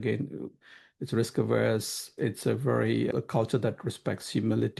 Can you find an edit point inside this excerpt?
yes; 2 cuts; at 2.1 s, 3.1 s

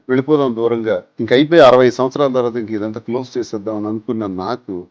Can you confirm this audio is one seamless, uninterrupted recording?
yes; 0 cuts

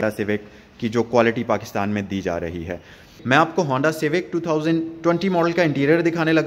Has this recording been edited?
yes; 1 cut; at 3.1 s

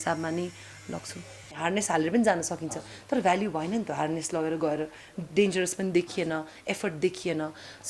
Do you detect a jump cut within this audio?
yes; 1 cut; at 1.5 s

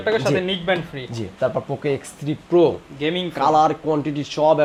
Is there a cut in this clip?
no; 0 cuts

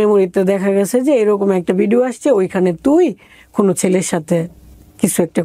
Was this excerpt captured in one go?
yes; 0 cuts

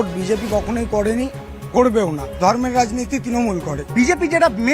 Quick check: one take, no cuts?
no; 1 cut; at 3.8 s

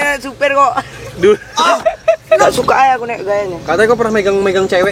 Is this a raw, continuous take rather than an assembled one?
no; 1 cut; at 2.4 s

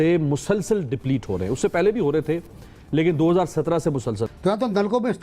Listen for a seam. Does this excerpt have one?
yes; 1 cut; at 4.3 s

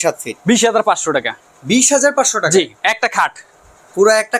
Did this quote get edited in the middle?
no; 0 cuts

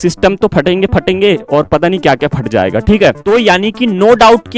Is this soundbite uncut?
no; 1 cut; at 3.2 s

